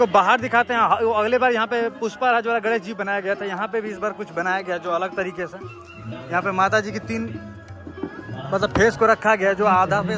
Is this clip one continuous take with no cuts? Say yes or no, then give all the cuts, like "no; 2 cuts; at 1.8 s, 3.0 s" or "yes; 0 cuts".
yes; 0 cuts